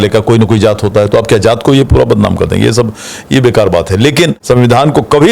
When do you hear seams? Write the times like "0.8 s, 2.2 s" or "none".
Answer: 4.4 s